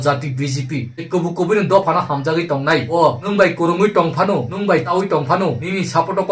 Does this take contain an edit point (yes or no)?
yes